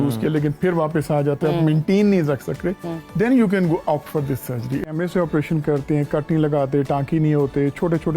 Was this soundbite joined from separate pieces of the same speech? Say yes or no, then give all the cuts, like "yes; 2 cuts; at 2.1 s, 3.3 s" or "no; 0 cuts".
yes; 1 cut; at 4.9 s